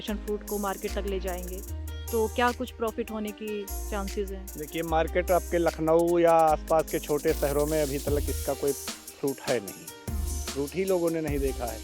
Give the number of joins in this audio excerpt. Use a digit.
0